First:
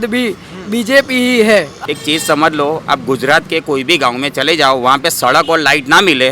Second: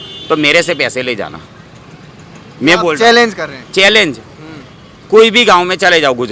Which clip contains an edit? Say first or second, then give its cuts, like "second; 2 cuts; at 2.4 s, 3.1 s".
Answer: first; 1 cut; at 1.7 s